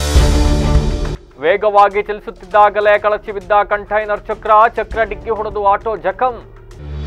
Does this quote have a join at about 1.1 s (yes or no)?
no